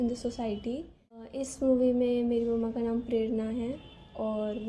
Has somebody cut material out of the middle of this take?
yes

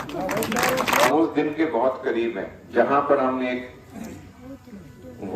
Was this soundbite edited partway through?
yes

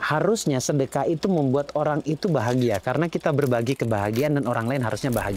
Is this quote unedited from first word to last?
yes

